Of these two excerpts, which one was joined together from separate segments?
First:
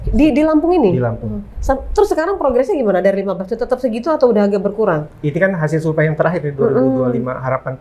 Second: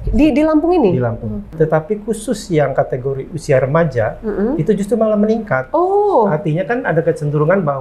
second; 1 cut; at 1.4 s

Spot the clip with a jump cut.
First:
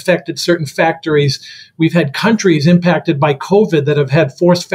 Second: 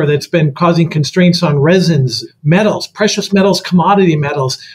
second; 1 cut; at 2.2 s

